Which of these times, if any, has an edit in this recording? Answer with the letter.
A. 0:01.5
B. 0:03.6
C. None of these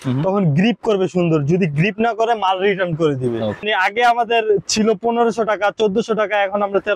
B